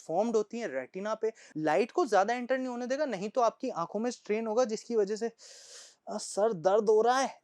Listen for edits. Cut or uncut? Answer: cut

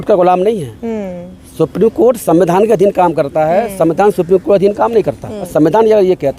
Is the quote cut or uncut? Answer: cut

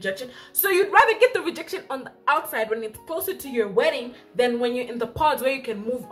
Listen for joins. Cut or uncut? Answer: uncut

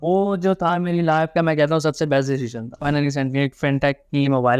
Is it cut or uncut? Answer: cut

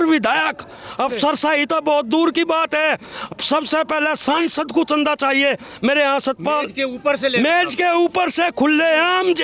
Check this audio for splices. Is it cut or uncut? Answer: uncut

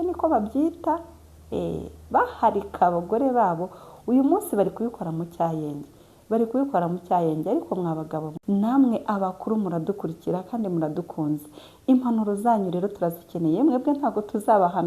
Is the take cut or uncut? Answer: cut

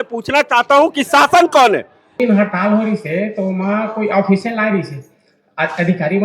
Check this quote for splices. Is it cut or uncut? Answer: cut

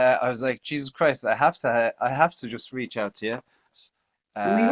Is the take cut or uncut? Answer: cut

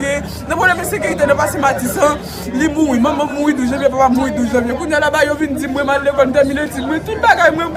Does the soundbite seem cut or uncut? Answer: uncut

